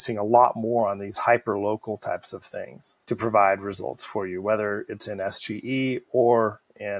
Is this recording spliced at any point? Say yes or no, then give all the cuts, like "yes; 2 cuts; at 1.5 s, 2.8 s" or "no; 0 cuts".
no; 0 cuts